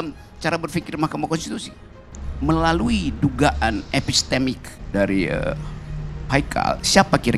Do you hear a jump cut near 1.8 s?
no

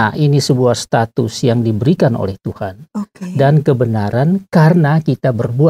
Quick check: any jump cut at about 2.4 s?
no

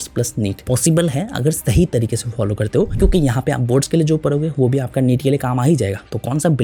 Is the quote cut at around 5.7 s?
no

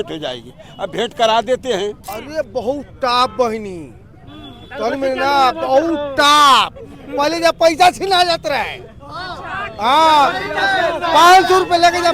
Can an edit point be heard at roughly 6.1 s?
no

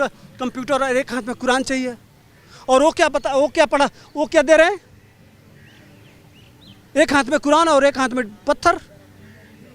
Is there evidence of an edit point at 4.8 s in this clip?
no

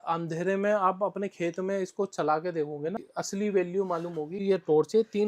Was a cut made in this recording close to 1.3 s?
no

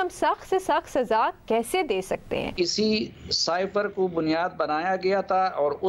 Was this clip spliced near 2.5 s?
yes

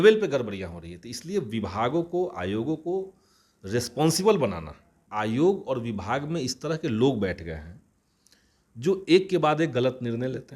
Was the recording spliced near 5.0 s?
yes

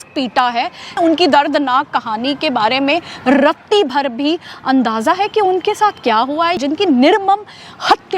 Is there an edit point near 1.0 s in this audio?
yes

